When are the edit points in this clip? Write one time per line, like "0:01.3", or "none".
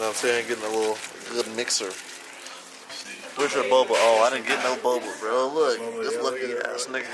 none